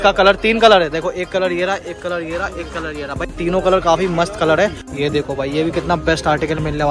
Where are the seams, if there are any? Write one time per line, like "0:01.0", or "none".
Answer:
0:04.8